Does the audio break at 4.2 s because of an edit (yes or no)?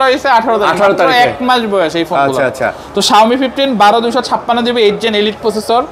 no